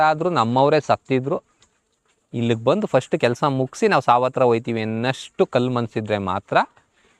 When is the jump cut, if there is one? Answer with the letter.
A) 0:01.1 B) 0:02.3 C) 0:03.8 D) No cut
D